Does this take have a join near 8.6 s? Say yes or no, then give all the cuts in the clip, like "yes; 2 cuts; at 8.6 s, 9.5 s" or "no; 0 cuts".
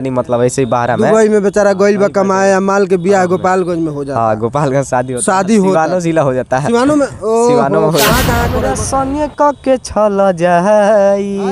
yes; 1 cut; at 8.6 s